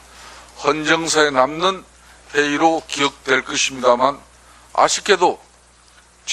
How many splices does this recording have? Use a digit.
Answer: 1